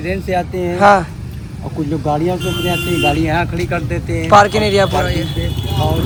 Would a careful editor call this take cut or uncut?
uncut